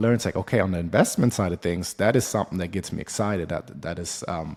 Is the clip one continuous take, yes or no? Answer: yes